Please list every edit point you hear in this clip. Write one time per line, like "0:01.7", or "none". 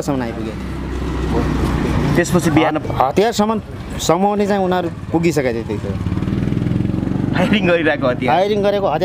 none